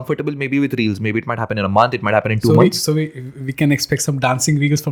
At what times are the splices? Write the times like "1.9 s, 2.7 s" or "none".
none